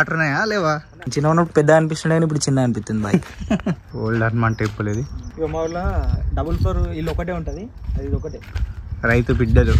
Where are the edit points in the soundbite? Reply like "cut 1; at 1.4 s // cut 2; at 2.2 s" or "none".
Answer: cut 1; at 1.0 s // cut 2; at 3.9 s // cut 3; at 5.2 s